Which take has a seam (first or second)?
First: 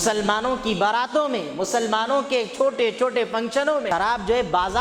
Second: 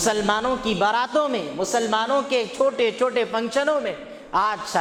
first